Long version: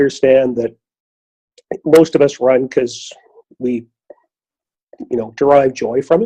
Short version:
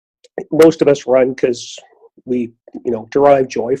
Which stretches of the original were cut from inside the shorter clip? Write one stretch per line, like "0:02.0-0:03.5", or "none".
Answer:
0:04.0-0:04.9